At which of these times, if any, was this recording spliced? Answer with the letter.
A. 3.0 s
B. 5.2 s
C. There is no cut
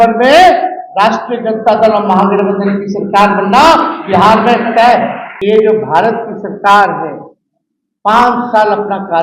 B